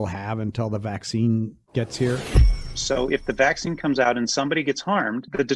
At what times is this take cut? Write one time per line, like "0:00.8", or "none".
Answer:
0:02.6